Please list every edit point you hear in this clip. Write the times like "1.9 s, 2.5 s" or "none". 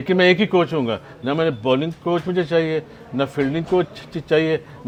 none

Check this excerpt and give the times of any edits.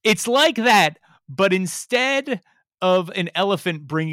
none

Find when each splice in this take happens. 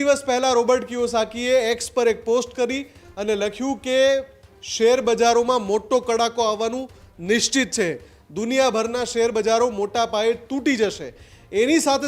none

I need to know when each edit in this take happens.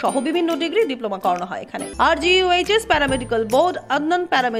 1.8 s

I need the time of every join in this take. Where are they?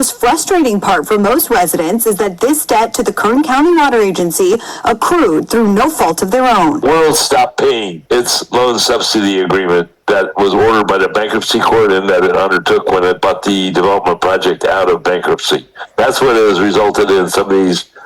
6.8 s

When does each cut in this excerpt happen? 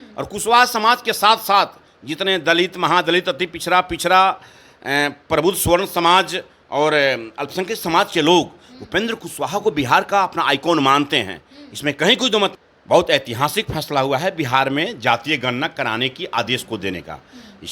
12.7 s

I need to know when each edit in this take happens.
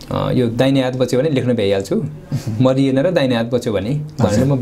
none

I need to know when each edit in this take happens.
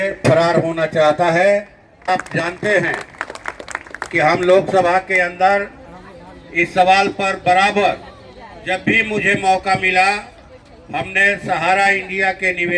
2.1 s

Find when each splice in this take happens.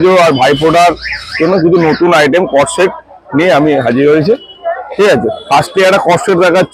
none

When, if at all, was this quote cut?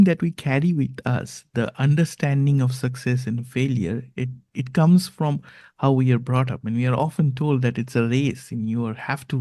none

